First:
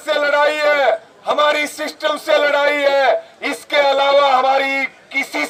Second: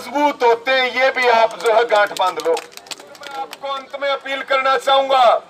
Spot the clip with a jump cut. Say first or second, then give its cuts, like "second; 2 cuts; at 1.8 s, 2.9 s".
second; 1 cut; at 3.4 s